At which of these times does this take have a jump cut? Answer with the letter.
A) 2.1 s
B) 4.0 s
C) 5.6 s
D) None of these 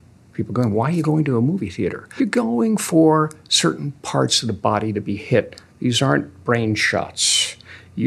A